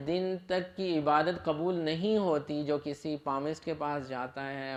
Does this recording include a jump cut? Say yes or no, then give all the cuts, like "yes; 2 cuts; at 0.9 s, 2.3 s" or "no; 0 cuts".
no; 0 cuts